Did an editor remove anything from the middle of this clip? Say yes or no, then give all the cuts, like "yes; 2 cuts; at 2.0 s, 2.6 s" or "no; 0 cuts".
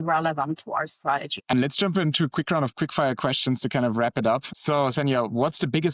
no; 0 cuts